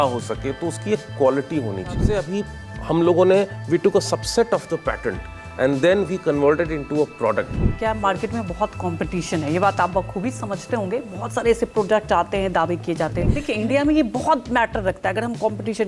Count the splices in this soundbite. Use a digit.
3